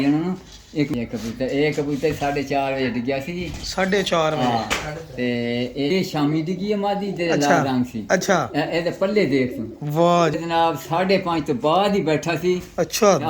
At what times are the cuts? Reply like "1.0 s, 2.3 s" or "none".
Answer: 0.9 s, 5.9 s, 10.3 s